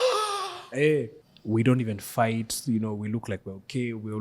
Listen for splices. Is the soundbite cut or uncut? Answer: cut